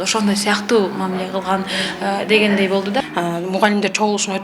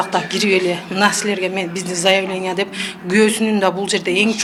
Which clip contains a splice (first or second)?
first